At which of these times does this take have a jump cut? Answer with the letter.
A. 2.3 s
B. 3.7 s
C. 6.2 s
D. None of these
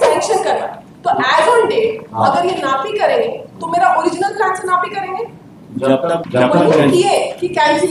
C